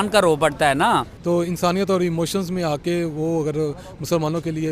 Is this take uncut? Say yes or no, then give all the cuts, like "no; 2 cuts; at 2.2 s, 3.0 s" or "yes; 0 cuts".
no; 1 cut; at 1.1 s